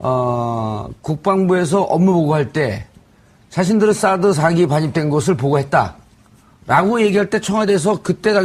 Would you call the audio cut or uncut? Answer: cut